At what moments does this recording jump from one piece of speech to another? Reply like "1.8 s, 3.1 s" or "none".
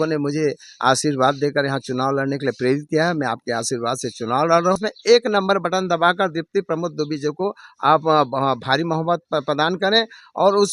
4.8 s